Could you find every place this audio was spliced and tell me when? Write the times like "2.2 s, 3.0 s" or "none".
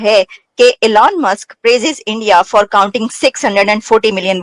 none